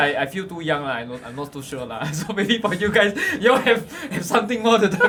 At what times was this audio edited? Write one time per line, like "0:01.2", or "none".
none